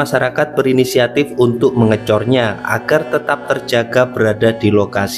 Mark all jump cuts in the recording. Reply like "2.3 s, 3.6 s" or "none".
none